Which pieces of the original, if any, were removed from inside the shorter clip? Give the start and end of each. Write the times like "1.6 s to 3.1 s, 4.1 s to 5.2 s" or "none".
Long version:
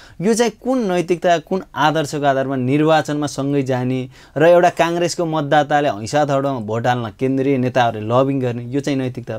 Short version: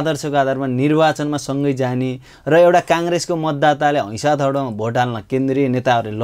none